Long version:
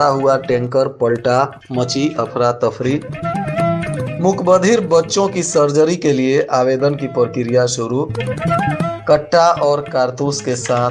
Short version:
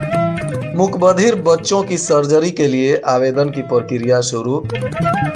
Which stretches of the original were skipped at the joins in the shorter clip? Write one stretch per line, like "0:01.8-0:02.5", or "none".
none